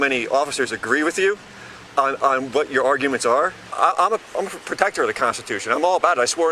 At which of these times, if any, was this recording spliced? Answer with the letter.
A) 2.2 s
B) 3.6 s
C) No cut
B